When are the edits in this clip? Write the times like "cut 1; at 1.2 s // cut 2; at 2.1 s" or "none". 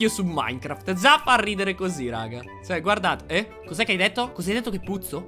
none